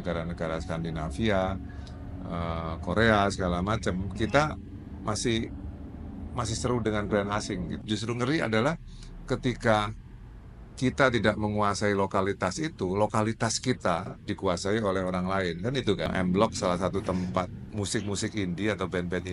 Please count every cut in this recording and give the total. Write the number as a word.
three